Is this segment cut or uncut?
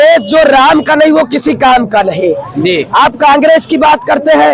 uncut